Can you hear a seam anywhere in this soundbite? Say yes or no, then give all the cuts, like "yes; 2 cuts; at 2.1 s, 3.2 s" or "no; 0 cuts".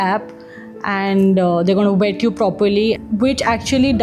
no; 0 cuts